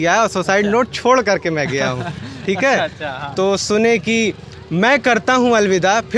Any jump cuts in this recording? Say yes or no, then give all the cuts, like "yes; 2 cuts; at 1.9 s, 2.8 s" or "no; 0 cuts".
no; 0 cuts